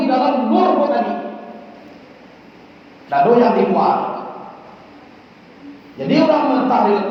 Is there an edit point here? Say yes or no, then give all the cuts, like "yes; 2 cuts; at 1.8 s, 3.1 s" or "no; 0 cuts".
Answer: no; 0 cuts